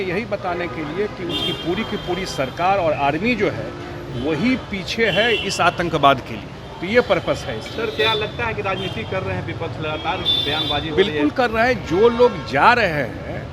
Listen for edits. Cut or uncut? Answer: uncut